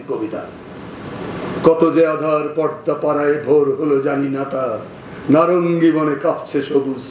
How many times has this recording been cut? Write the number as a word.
zero